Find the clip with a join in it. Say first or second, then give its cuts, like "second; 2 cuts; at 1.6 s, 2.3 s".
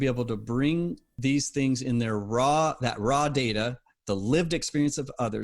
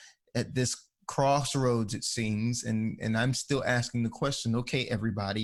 first; 1 cut; at 1.0 s